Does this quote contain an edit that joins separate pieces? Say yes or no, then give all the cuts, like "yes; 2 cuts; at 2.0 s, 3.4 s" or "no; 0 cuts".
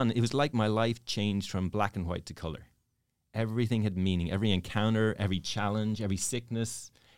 no; 0 cuts